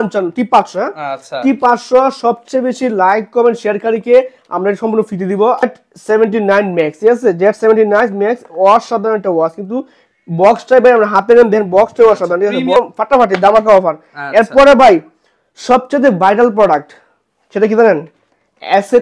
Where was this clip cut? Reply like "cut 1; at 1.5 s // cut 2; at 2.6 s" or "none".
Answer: cut 1; at 5.6 s // cut 2; at 12.8 s